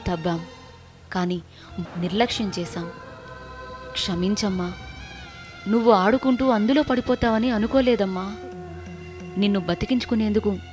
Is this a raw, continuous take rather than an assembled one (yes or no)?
no